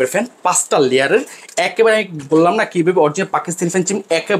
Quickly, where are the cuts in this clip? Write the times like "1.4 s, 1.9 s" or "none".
none